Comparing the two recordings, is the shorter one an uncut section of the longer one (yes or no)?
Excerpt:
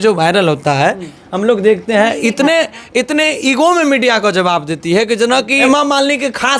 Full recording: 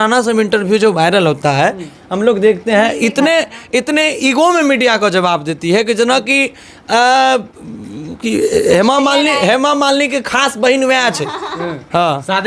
no